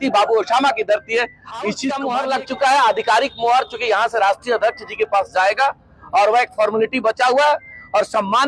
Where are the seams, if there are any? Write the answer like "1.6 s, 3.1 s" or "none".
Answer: 1.9 s